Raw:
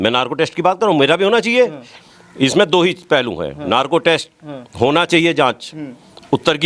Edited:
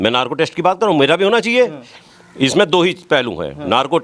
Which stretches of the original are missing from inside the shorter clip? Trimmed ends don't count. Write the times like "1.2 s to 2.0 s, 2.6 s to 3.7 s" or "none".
none